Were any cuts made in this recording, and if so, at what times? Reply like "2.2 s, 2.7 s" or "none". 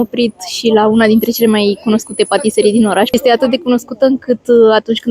3.1 s